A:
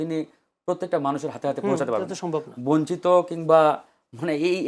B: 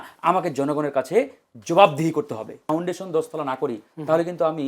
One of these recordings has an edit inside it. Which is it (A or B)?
B